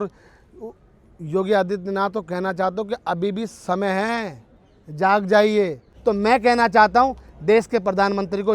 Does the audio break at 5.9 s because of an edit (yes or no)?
yes